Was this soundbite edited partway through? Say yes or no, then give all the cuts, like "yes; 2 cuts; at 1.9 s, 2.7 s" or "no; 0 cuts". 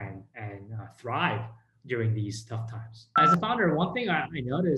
yes; 1 cut; at 3.2 s